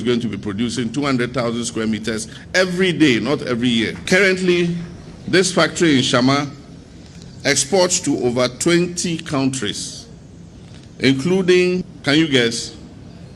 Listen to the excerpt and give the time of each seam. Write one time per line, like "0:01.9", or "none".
0:04.0
0:11.9

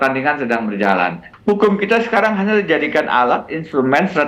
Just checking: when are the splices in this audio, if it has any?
0:01.3

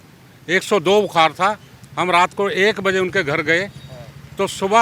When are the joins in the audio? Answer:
none

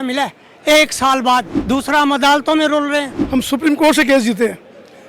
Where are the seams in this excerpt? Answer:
0:01.5
0:03.2

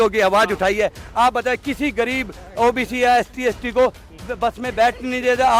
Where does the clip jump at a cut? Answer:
none

